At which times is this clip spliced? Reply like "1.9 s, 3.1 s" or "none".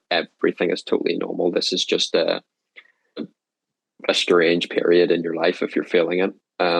3.2 s